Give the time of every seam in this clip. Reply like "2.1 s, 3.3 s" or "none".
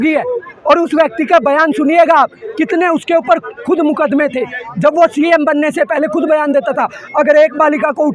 none